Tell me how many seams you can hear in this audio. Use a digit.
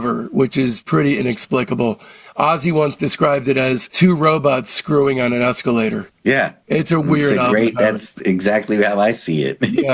0